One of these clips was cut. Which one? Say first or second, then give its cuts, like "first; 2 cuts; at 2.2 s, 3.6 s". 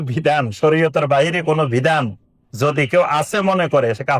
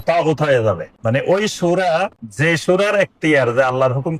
second; 2 cuts; at 0.9 s, 2.2 s